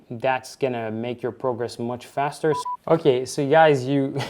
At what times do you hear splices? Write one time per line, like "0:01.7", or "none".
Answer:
0:02.6